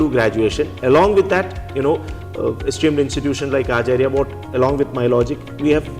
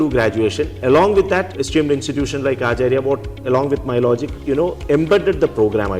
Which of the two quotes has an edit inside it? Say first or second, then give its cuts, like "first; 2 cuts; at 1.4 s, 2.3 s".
second; 2 cuts; at 1.5 s, 4.3 s